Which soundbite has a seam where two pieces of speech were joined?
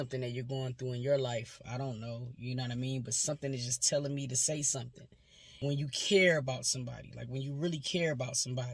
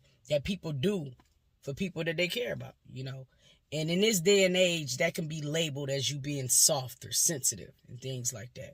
first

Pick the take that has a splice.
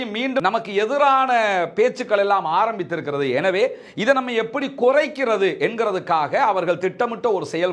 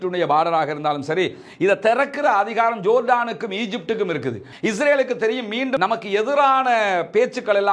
second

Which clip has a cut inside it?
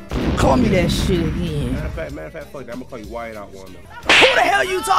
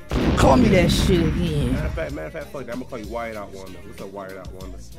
first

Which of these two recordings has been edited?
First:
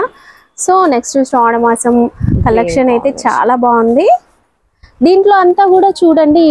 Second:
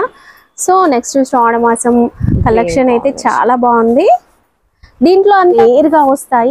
second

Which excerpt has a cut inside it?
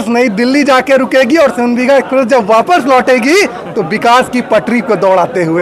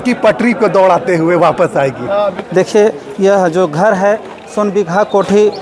second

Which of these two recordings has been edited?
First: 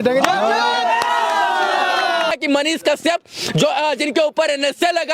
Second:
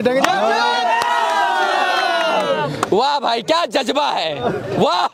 first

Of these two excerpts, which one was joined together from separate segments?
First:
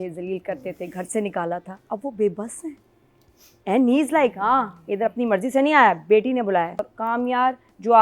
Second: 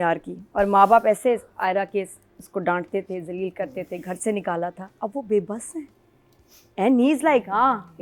first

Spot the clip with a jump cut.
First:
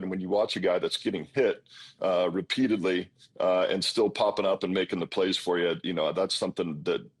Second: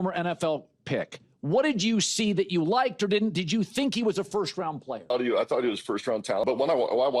second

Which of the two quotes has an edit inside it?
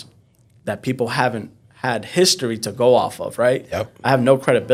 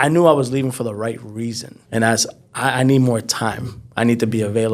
second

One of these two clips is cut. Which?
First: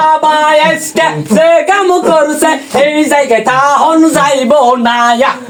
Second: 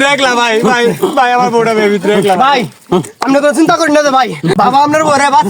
second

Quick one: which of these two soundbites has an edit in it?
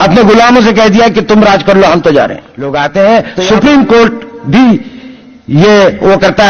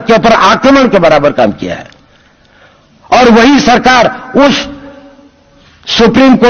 first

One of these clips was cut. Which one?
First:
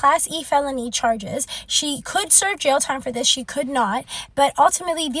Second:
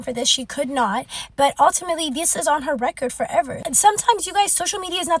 second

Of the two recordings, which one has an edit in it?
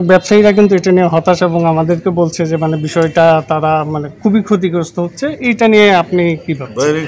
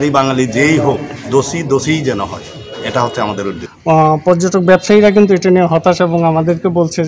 second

